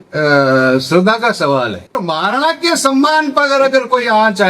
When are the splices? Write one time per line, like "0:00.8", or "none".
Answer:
0:02.0